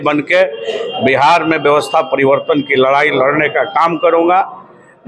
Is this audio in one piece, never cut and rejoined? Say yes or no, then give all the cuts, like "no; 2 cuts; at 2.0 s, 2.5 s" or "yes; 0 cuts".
yes; 0 cuts